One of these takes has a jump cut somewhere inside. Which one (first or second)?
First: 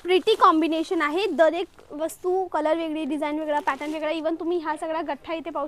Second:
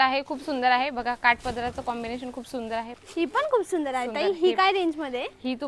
second